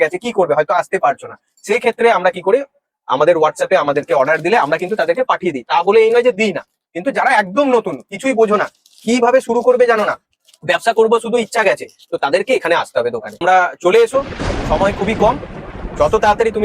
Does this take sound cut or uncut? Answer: cut